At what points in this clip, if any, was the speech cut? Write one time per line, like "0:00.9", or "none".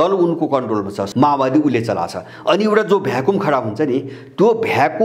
0:01.0